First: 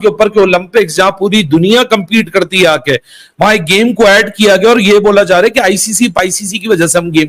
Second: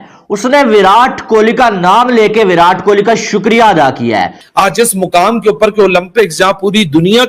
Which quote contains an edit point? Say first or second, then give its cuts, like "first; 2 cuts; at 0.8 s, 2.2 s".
second; 1 cut; at 4.4 s